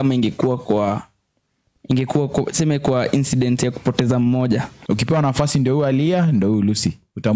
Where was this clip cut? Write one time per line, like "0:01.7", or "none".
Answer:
0:04.7